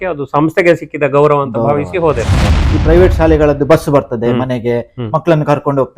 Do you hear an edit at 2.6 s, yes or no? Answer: yes